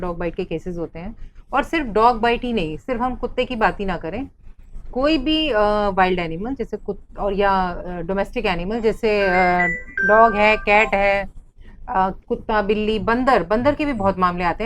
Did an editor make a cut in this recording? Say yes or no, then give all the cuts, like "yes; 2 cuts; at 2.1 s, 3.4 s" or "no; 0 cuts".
no; 0 cuts